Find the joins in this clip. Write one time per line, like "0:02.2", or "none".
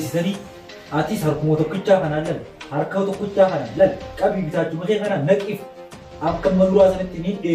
0:06.0